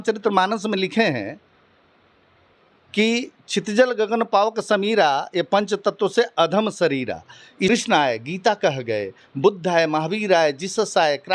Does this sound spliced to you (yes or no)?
yes